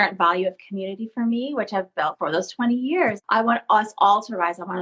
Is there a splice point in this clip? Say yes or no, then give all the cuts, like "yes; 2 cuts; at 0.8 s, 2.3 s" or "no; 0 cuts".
yes; 2 cuts; at 2.1 s, 3.2 s